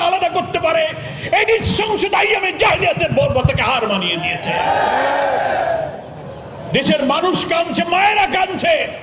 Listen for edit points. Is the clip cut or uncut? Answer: uncut